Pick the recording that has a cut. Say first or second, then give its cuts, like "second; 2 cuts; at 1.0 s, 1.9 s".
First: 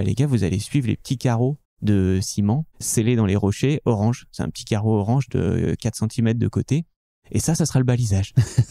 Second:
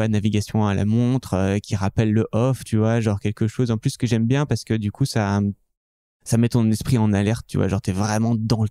first; 2 cuts; at 1.7 s, 2.8 s